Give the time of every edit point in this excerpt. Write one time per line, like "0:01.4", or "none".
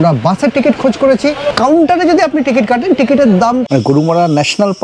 0:01.5
0:03.6

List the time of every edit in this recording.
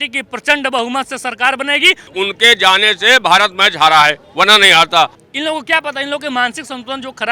0:02.1
0:05.2

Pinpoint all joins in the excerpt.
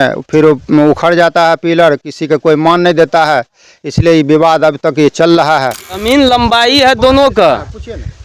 0:06.0

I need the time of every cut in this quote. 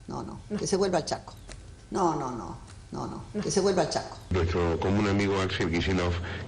0:04.2

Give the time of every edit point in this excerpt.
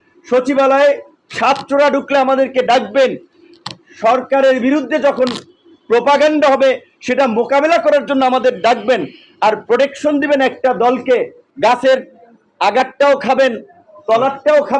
0:11.4

